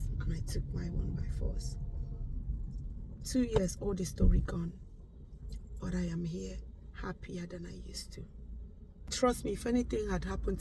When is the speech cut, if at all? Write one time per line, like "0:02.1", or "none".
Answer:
0:09.1